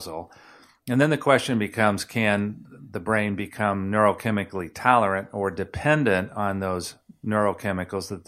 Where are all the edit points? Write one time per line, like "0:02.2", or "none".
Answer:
none

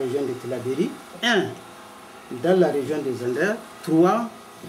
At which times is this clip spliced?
0:01.1
0:03.7

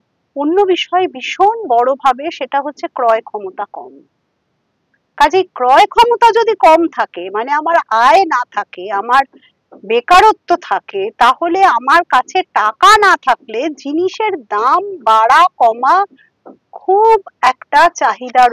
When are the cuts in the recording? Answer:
none

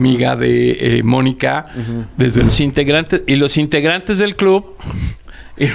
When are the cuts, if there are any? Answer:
0:02.5

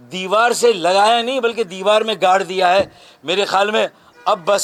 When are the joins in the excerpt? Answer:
none

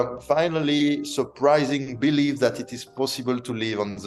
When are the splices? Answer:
none

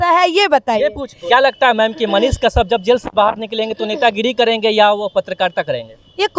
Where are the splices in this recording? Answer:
0:01.1

